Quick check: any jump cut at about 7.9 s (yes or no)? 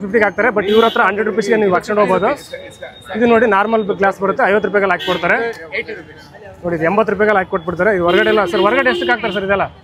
no